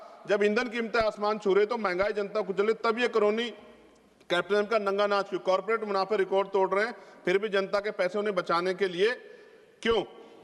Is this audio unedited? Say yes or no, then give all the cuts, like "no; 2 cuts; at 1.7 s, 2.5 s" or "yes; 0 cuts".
yes; 0 cuts